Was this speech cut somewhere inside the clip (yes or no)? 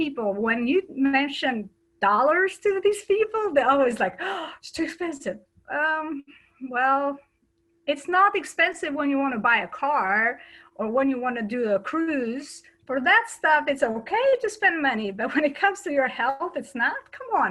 no